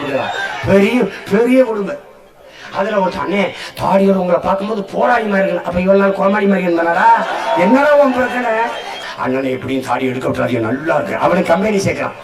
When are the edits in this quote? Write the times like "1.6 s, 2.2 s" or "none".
9.0 s